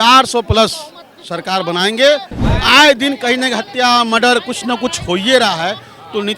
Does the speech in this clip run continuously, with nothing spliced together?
no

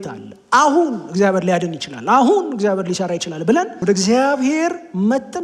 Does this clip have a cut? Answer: yes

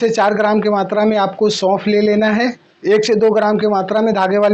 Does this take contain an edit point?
yes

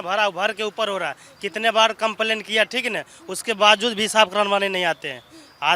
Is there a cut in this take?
no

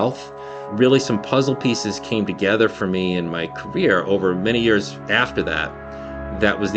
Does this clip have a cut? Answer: no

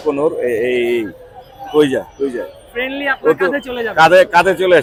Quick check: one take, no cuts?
yes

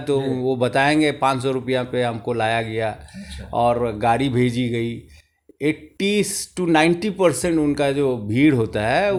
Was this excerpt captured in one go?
yes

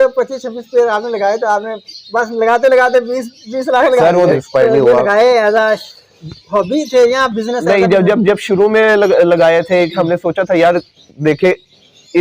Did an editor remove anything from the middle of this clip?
yes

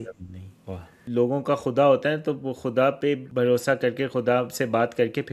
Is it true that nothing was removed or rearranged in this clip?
no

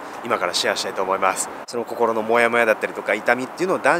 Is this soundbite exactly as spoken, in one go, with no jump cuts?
no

